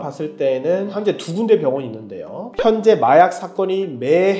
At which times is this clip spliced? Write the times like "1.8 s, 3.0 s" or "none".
2.5 s